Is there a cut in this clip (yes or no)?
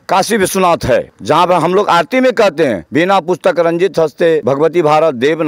yes